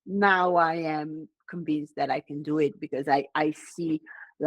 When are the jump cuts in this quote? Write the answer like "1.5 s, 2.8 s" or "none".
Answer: none